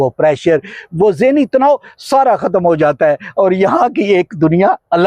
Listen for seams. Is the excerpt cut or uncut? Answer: uncut